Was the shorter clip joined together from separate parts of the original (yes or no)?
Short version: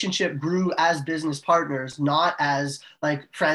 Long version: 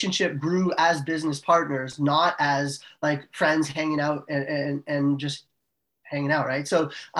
no